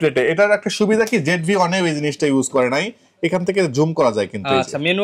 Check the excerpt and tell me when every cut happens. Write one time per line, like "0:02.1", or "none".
none